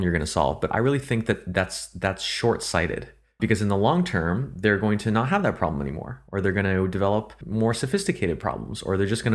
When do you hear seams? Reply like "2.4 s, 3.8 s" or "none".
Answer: 3.4 s, 7.4 s